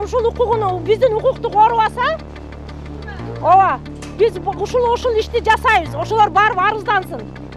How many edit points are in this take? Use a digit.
0